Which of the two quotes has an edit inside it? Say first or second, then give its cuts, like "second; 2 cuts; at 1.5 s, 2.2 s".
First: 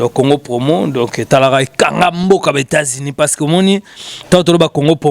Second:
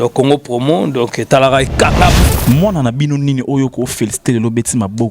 second; 1 cut; at 2.2 s